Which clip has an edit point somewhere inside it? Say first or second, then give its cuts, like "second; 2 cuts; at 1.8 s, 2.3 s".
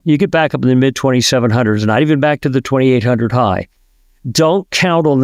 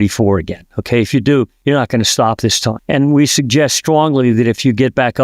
second; 1 cut; at 2.8 s